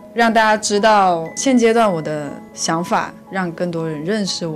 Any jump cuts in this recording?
yes; 1 cut; at 3.2 s

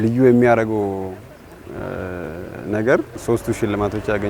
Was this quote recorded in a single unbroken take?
no; 1 cut; at 3.1 s

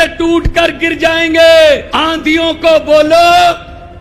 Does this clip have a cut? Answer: yes; 1 cut; at 1.9 s

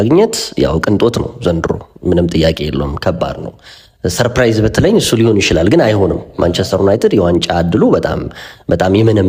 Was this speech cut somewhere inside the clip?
no; 0 cuts

